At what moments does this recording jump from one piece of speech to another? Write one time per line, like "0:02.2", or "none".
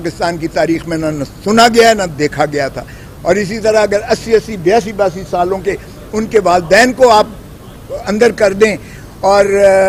none